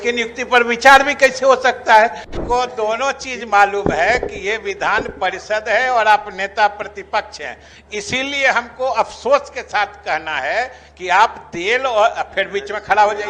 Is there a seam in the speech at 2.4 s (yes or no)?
yes